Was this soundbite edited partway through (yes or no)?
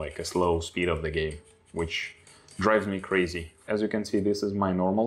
yes